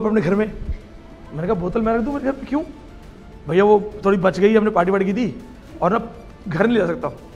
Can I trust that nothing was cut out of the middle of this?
yes; 0 cuts

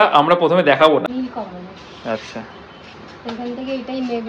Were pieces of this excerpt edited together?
yes; 1 cut; at 1.1 s

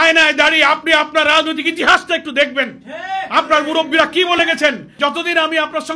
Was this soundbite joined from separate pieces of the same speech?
yes; 1 cut; at 4.9 s

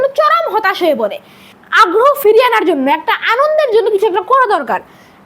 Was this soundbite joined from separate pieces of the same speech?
yes; 1 cut; at 1.5 s

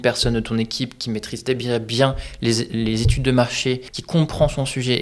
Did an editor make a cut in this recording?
yes; 1 cut; at 3.9 s

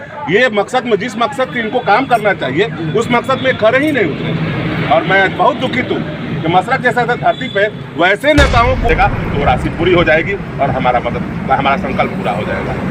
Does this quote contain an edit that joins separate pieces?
yes; 1 cut; at 8.9 s

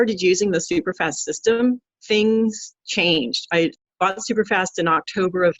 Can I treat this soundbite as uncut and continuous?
no; 1 cut; at 3.8 s

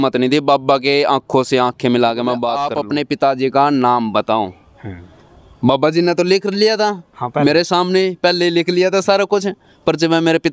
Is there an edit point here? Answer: yes; 1 cut; at 2.7 s

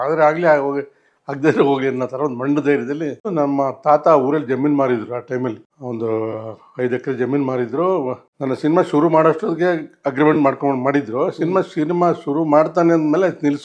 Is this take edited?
yes; 3 cuts; at 3.3 s, 5.7 s, 8.3 s

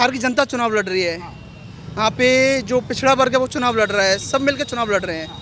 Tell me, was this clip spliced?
no; 0 cuts

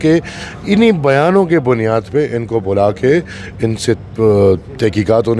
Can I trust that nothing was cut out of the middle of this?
yes; 0 cuts

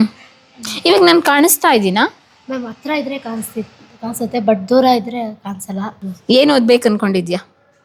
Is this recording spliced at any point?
yes; 1 cut; at 6.0 s

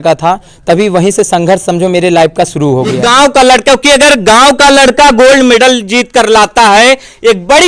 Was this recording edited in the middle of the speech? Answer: yes; 1 cut; at 3.0 s

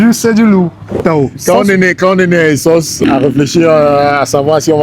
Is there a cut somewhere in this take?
yes; 2 cuts; at 1.0 s, 2.9 s

